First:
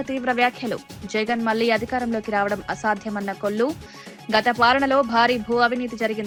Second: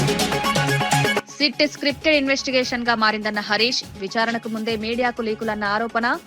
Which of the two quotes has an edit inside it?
second; 1 cut; at 1.2 s

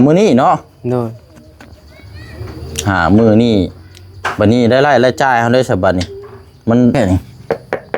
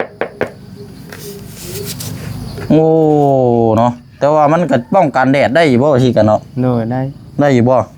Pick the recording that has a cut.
first; 1 cut; at 6.9 s

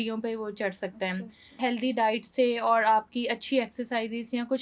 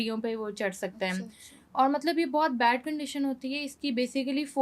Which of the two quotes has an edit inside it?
first; 1 cut; at 1.6 s

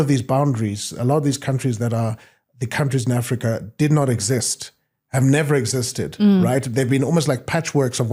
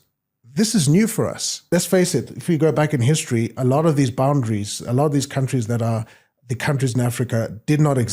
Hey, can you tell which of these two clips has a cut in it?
second; 1 cut; at 1.7 s

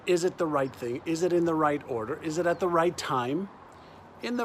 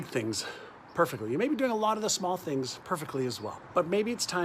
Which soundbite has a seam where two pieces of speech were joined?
second; 1 cut; at 3.5 s

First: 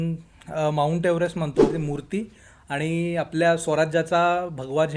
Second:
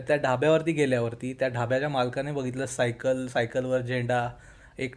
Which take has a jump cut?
first; 1 cut; at 1.7 s

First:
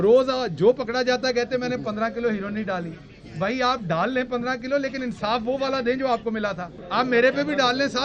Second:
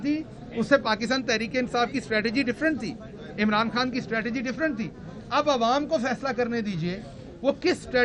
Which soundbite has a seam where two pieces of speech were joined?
first; 1 cut; at 6.7 s

